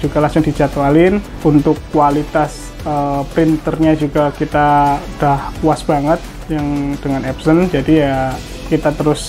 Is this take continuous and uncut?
yes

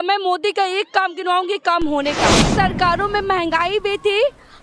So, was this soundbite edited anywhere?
yes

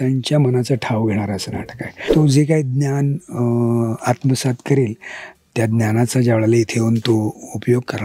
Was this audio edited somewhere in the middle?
yes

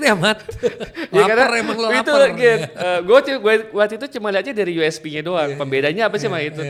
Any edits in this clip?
no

